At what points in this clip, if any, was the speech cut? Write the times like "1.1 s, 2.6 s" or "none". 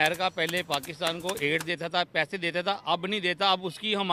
none